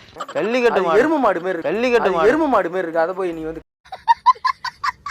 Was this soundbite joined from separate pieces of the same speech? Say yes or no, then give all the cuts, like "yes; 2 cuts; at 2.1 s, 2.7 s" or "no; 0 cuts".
no; 0 cuts